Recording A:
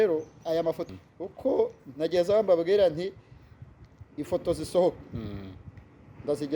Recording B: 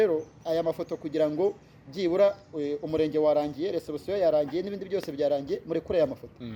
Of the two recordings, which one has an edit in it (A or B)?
A